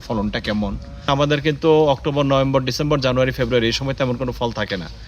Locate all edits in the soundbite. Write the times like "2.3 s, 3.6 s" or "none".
1.1 s